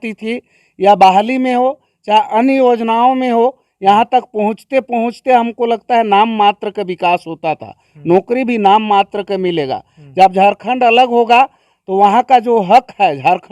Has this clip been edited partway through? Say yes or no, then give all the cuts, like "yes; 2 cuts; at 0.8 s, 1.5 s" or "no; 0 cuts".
no; 0 cuts